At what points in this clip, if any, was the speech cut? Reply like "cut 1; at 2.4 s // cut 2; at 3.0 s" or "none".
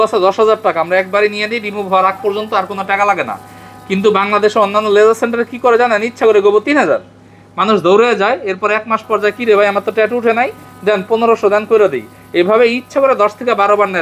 none